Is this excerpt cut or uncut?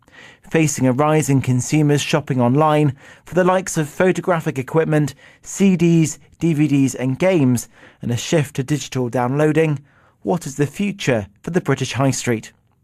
cut